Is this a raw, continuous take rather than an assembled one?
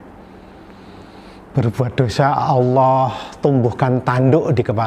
yes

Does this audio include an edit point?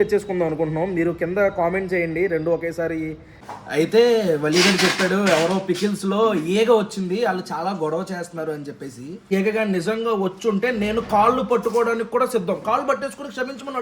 yes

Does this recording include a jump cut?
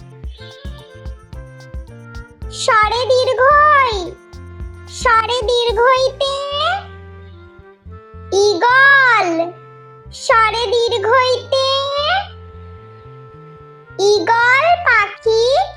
yes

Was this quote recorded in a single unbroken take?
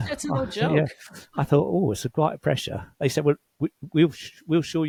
yes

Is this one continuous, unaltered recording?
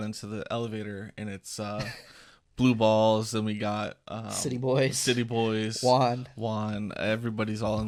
yes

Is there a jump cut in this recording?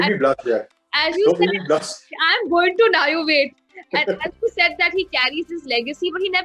no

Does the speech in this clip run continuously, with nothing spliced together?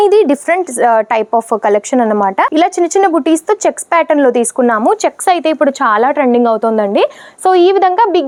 yes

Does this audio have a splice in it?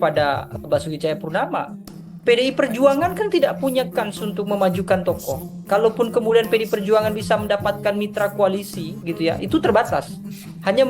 yes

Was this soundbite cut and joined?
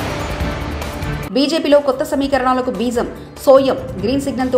no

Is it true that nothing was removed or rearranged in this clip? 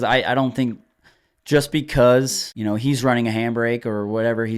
no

